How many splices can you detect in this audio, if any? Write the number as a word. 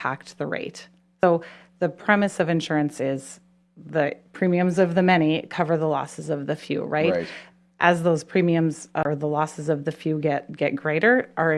two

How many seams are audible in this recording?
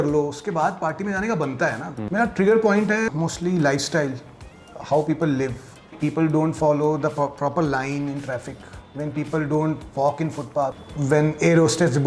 four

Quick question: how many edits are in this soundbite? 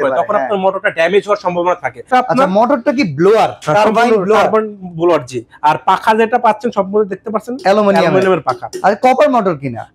one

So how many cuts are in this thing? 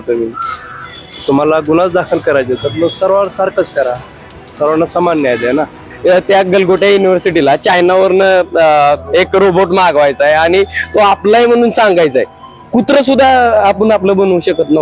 one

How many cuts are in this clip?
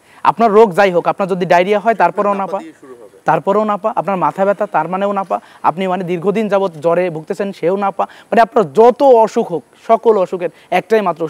zero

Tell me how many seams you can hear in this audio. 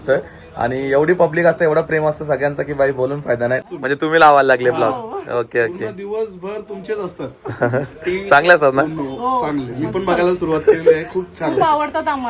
one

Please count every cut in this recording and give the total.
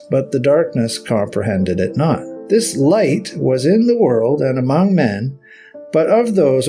one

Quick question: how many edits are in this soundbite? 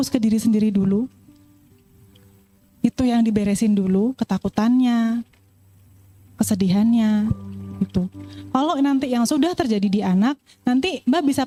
zero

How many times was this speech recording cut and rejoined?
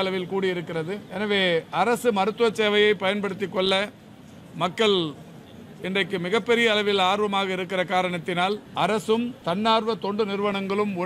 three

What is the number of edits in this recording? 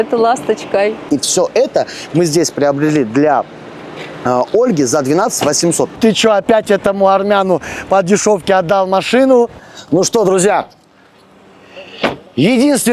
three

